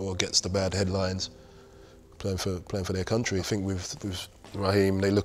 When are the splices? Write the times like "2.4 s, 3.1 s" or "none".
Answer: 3.5 s